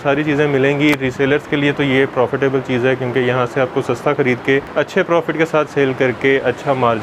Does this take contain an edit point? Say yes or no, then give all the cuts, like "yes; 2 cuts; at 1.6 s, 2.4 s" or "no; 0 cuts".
yes; 1 cut; at 4.7 s